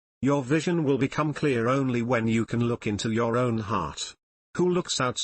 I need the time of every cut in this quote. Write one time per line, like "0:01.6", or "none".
0:00.9

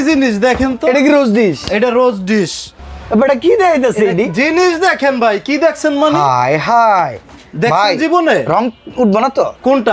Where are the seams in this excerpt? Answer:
0:02.8

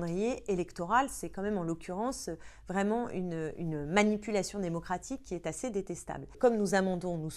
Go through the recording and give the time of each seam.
0:06.3

